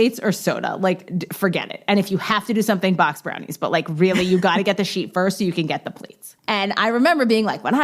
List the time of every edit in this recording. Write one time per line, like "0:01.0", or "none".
0:06.3